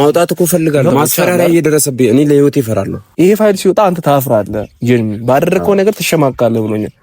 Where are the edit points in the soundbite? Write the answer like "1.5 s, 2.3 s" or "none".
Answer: 0.9 s, 3.0 s